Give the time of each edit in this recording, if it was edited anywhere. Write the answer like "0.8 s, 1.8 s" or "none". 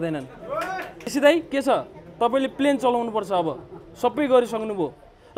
1.1 s

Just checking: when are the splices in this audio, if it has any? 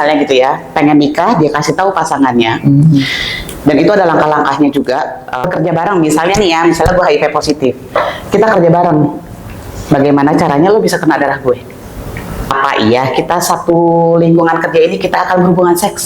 5.4 s, 12.5 s

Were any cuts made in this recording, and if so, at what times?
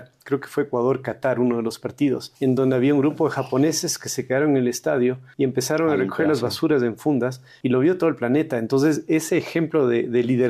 2.3 s, 5.2 s, 7.4 s

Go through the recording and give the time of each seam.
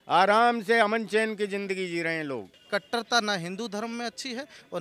2.5 s

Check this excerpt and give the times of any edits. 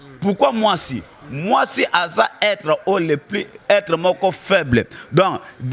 none

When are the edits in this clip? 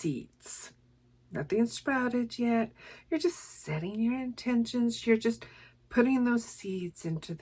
none

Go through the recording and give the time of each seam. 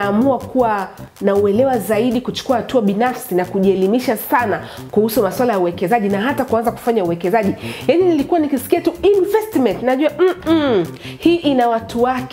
none

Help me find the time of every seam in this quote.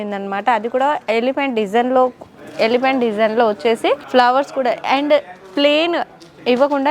4.0 s

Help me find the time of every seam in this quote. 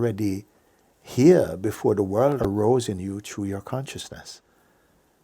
2.4 s

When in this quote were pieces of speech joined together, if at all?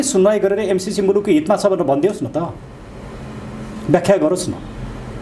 none

